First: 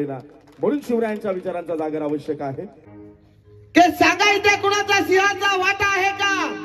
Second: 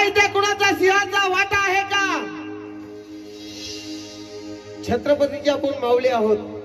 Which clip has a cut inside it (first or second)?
first